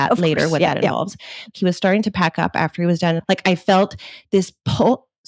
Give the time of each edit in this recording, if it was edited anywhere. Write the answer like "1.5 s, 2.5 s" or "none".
1.5 s, 3.2 s